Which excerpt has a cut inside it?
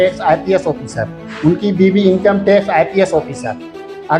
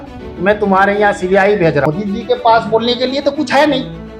second; 1 cut; at 1.9 s

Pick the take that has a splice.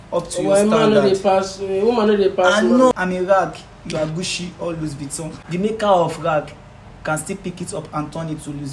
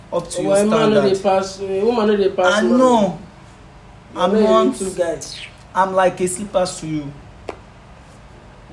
first; 2 cuts; at 2.9 s, 5.4 s

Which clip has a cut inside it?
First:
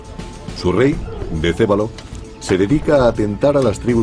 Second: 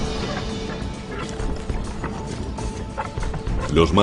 second; 1 cut; at 2.0 s

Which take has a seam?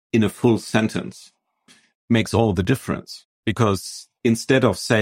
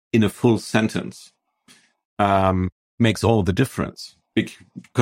first; 2 cuts; at 1.9 s, 3.2 s

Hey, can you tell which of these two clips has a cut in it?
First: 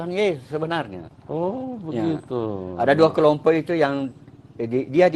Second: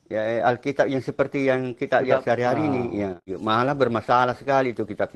second; 1 cut; at 3.3 s

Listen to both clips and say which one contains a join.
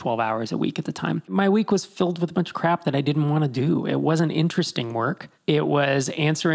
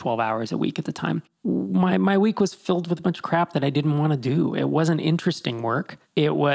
first; 1 cut; at 1.3 s

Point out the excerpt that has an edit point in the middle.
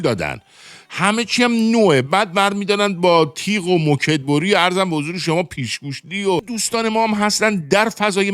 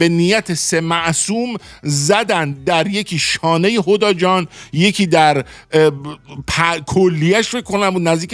first; 1 cut; at 6.6 s

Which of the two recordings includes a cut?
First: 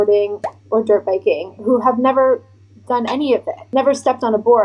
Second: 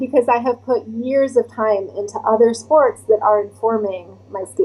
first; 1 cut; at 3.6 s

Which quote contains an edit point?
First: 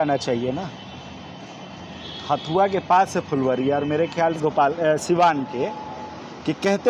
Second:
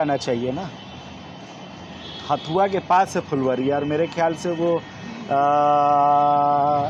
first; 1 cut; at 4.5 s

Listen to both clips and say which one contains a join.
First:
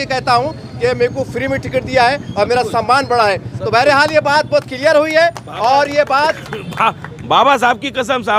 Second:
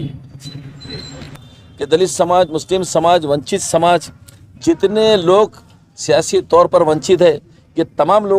second; 1 cut; at 1.3 s

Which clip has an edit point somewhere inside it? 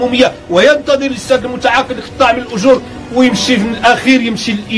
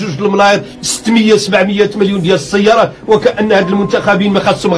first; 1 cut; at 3.7 s

